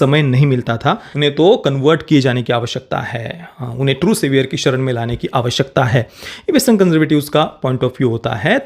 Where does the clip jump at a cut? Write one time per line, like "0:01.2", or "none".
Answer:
0:01.1